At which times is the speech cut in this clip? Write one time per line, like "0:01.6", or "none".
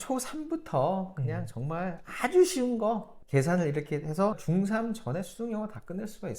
0:03.2
0:04.4